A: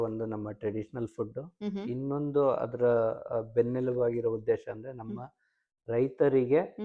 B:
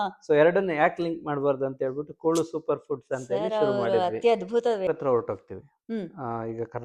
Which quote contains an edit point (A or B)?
B